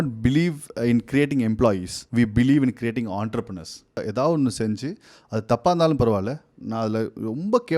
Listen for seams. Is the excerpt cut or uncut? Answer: cut